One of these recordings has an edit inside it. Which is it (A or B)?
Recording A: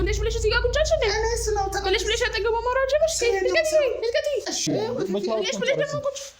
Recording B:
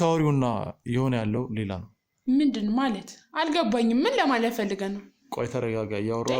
A